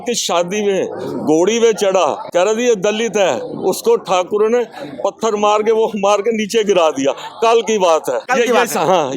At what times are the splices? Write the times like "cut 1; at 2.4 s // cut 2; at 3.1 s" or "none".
cut 1; at 2.2 s // cut 2; at 8.2 s

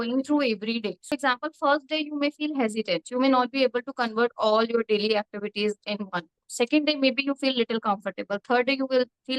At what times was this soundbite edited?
cut 1; at 1.0 s

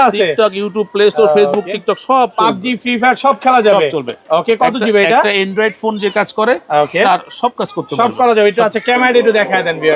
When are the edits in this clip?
none

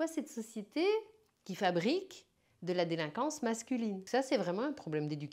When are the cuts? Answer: cut 1; at 4.0 s

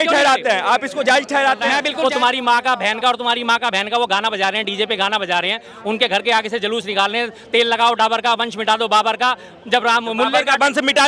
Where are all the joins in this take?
cut 1; at 1.9 s

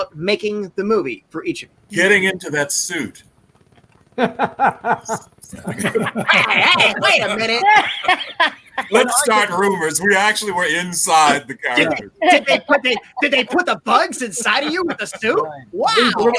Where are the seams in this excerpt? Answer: cut 1; at 1.7 s

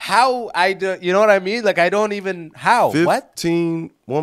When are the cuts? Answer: none

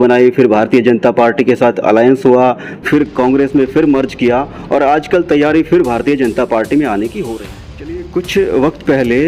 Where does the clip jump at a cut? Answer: cut 1; at 7.2 s

